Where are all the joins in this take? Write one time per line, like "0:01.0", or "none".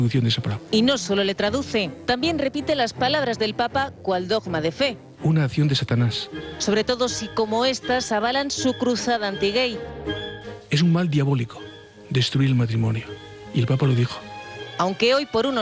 0:03.9

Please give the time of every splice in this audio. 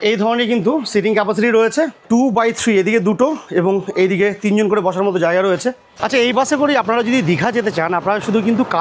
0:02.0
0:05.9

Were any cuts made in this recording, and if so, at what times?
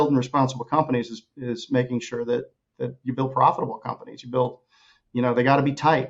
none

